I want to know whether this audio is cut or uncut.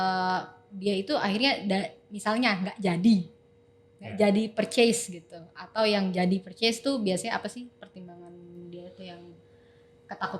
uncut